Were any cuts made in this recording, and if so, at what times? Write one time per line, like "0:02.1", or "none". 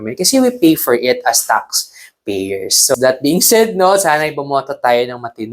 0:02.9